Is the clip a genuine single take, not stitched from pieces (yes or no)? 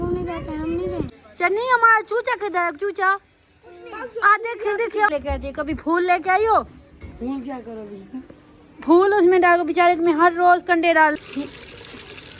no